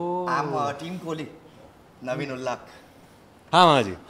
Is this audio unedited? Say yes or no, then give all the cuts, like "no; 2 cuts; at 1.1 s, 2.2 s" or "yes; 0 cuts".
yes; 0 cuts